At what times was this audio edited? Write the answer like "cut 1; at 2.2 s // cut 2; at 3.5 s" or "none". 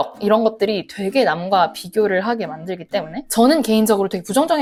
none